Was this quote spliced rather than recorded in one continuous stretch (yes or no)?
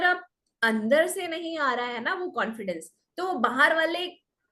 no